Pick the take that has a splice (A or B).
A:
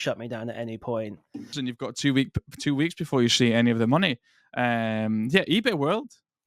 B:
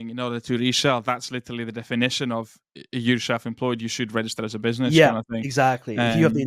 A